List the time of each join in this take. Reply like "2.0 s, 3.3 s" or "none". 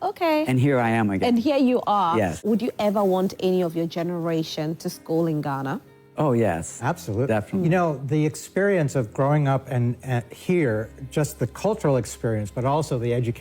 2.4 s